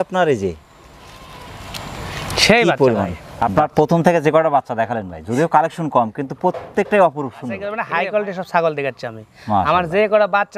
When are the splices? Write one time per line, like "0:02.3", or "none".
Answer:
0:03.2
0:07.8